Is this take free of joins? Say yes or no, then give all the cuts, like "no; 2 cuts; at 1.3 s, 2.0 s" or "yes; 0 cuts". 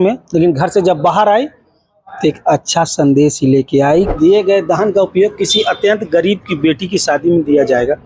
no; 1 cut; at 4.1 s